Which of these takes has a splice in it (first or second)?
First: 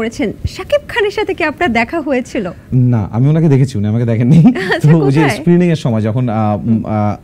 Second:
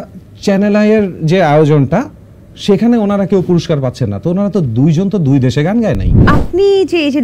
second